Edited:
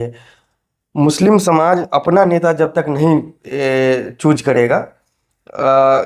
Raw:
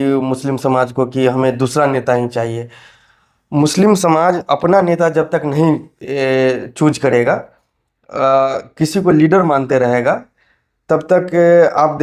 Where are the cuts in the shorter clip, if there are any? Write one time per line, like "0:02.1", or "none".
none